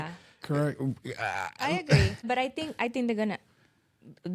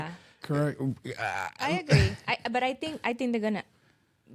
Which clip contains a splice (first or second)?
first